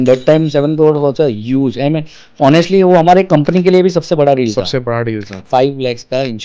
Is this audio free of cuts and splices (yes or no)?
no